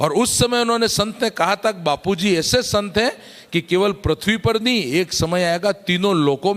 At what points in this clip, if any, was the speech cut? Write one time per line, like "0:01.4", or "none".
none